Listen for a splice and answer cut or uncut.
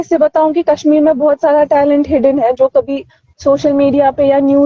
uncut